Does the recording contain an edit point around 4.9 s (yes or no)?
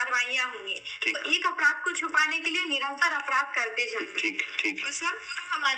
no